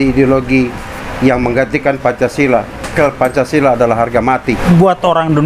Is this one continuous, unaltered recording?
no; 2 cuts; at 2.9 s, 4.6 s

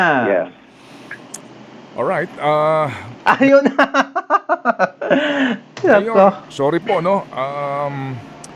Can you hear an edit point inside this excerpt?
no; 0 cuts

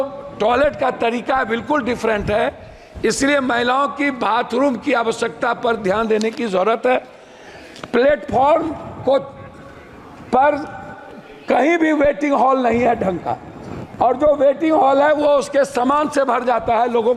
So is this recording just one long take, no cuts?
yes; 0 cuts

